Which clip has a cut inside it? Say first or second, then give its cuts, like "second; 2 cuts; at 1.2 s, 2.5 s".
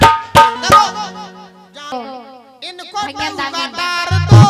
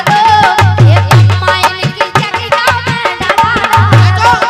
first; 1 cut; at 1.9 s